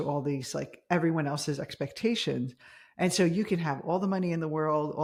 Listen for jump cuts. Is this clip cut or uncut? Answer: uncut